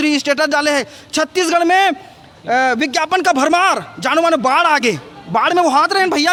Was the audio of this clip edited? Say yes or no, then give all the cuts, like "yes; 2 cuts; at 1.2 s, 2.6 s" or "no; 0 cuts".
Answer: no; 0 cuts